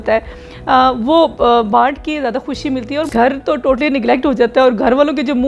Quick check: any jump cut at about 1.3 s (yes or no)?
no